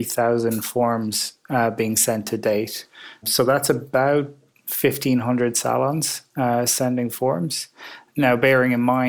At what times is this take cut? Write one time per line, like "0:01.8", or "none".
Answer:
0:03.3
0:08.0